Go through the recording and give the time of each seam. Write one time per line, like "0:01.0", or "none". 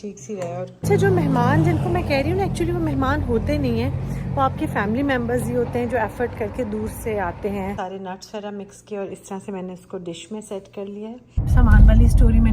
0:00.9
0:07.8
0:11.5

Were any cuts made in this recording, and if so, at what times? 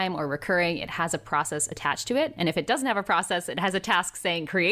none

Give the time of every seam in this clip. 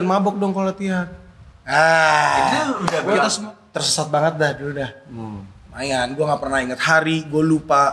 0:03.3

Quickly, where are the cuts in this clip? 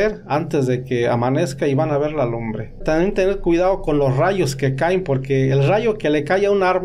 0:02.8

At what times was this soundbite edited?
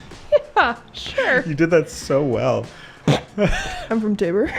none

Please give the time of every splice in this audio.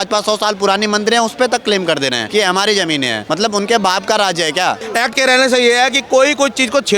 0:02.2
0:03.2
0:04.8

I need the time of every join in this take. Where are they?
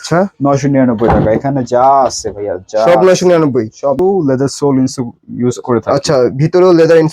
0:04.0

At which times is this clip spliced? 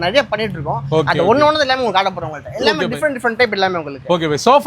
none

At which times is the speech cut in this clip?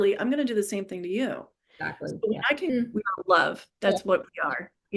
0:02.7

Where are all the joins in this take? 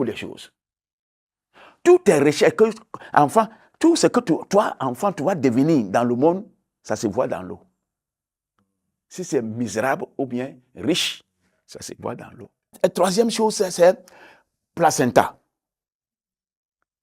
0:12.7

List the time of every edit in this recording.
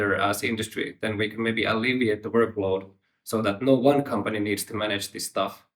0:00.9

